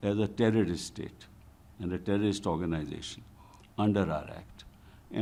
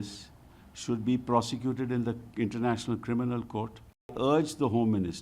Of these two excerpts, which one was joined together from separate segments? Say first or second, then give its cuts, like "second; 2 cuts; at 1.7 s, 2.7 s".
second; 1 cut; at 4.1 s